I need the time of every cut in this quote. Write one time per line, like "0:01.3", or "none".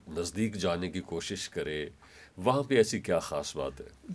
none